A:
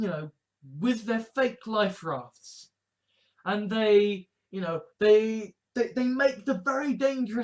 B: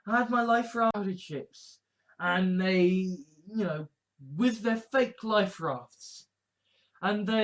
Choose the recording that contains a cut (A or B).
B